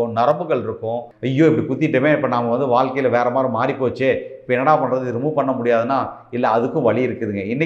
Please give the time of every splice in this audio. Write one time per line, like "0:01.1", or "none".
0:01.1